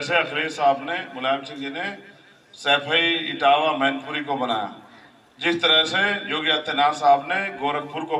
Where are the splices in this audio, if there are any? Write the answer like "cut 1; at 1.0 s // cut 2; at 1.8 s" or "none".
none